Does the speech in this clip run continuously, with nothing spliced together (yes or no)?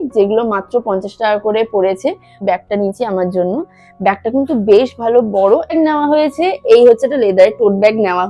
no